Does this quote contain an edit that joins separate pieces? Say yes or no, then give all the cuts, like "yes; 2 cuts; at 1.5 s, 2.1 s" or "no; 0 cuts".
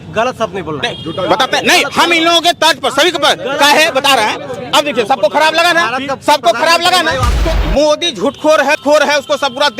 yes; 2 cuts; at 7.3 s, 8.8 s